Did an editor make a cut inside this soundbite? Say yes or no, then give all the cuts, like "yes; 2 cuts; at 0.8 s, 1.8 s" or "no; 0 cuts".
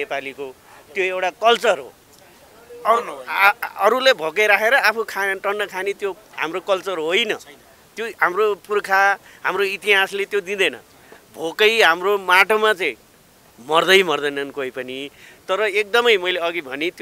no; 0 cuts